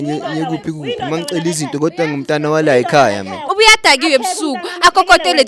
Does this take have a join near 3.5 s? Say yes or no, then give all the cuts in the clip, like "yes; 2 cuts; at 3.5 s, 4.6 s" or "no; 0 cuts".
yes; 1 cut; at 3.5 s